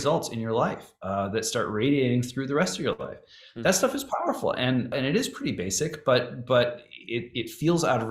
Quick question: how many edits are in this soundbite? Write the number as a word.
one